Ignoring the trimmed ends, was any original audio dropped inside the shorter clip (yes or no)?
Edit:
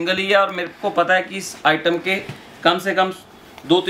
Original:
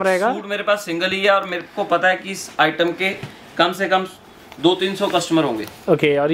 no